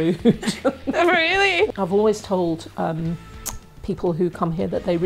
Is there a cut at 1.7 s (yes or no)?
yes